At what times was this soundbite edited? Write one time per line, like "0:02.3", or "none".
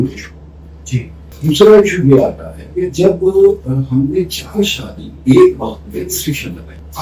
none